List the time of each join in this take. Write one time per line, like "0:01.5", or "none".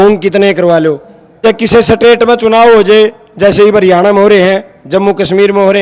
0:01.4